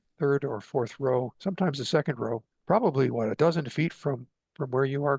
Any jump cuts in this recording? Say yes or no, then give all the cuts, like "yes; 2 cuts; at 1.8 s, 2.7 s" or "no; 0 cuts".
yes; 1 cut; at 2.5 s